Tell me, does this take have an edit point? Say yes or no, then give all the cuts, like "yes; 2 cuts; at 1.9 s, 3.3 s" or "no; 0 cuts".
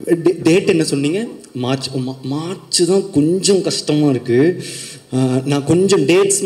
no; 0 cuts